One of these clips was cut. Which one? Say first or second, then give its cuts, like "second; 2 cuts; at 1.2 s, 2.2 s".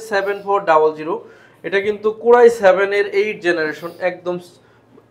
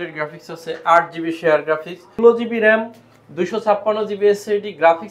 second; 1 cut; at 2.2 s